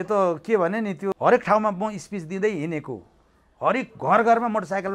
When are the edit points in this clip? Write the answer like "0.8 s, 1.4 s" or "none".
1.1 s